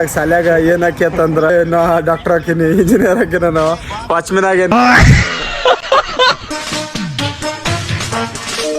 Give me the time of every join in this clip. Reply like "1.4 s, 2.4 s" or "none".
1.5 s, 4.7 s, 6.4 s